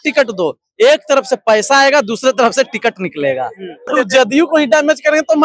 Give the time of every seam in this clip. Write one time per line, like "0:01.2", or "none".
0:03.9